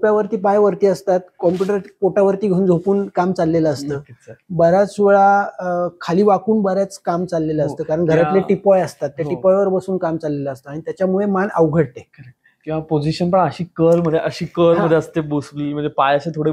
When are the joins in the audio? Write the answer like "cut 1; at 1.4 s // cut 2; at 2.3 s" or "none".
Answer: none

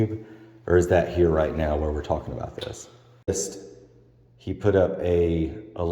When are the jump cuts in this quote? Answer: cut 1; at 3.3 s

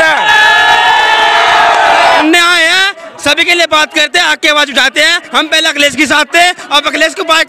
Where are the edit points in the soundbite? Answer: cut 1; at 2.2 s

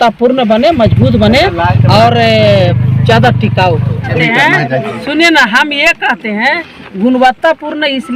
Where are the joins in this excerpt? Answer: cut 1; at 4.1 s

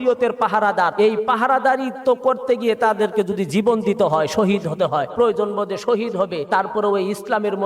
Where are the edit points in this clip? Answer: cut 1; at 0.9 s // cut 2; at 5.1 s // cut 3; at 6.4 s

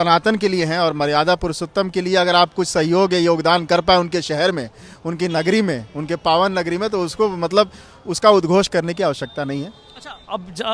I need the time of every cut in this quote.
none

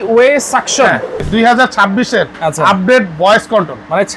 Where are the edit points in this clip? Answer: cut 1; at 1.2 s

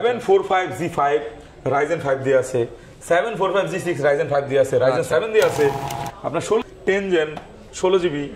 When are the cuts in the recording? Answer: cut 1; at 6.7 s

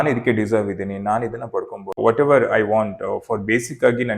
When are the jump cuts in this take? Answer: cut 1; at 2.0 s

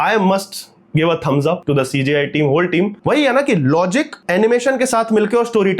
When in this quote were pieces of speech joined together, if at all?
cut 1; at 1.6 s // cut 2; at 3.0 s // cut 3; at 4.2 s

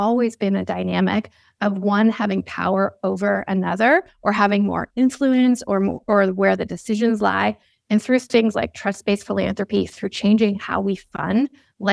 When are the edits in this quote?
none

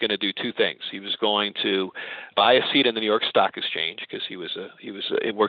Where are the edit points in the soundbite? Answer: cut 1; at 2.3 s

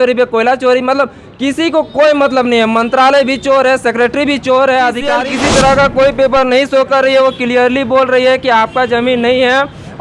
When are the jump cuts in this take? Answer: cut 1; at 5.2 s

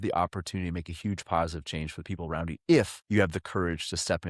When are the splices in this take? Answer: cut 1; at 3.0 s

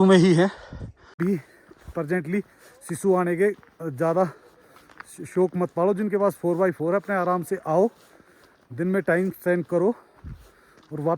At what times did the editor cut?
cut 1; at 1.1 s

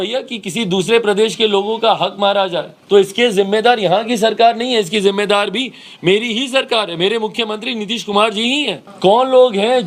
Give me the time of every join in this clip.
cut 1; at 2.7 s // cut 2; at 8.8 s

